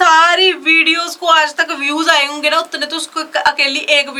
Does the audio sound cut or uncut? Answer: uncut